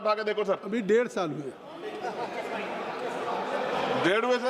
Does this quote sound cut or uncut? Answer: uncut